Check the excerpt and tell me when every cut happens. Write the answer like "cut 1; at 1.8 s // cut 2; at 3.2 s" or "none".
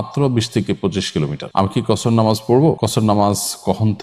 cut 1; at 1.4 s // cut 2; at 2.8 s

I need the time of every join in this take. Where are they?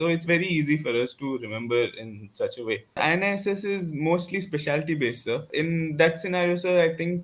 cut 1; at 3.0 s // cut 2; at 5.5 s

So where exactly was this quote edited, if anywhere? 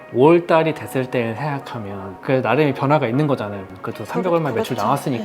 cut 1; at 2.1 s // cut 2; at 3.6 s

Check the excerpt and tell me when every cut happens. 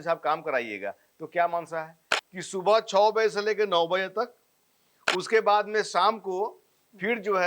cut 1; at 2.1 s

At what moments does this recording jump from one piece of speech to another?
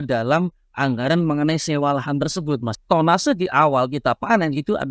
cut 1; at 2.7 s

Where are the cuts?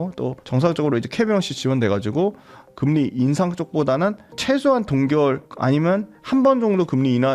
cut 1; at 1.5 s

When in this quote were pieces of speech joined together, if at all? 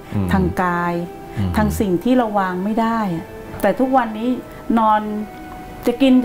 cut 1; at 3.5 s

